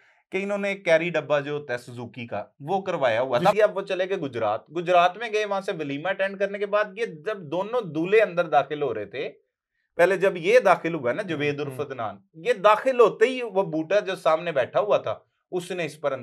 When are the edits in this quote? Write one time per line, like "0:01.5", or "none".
0:03.5